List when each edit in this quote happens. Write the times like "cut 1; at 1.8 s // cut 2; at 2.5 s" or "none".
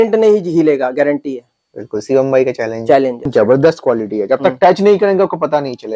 cut 1; at 3.3 s